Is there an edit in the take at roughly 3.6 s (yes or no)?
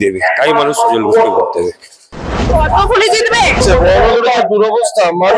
yes